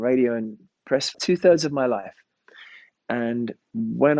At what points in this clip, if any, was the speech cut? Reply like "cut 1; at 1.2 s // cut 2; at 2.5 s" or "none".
cut 1; at 1.2 s

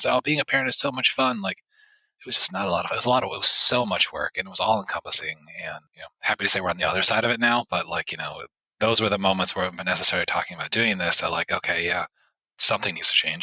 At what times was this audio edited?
cut 1; at 12.5 s

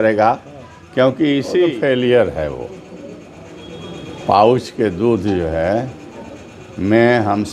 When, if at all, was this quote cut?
cut 1; at 1.7 s

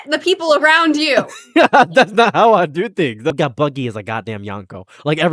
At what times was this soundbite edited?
cut 1; at 3.3 s

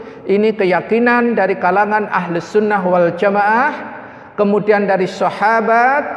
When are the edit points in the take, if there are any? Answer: none

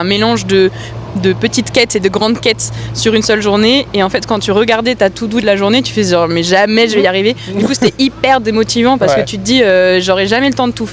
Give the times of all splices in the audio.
none

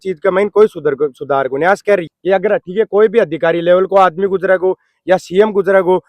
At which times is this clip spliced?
cut 1; at 2.0 s

